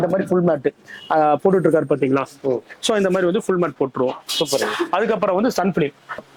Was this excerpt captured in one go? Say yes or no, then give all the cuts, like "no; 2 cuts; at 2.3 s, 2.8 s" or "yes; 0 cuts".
yes; 0 cuts